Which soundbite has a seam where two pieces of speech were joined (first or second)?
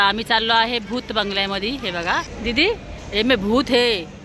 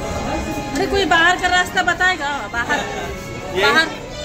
first